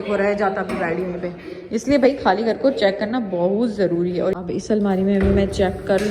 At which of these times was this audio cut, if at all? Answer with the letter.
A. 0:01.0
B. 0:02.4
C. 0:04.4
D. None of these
D